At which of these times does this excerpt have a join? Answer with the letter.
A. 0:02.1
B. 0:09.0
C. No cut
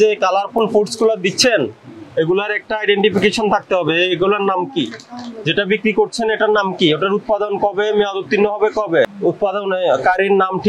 B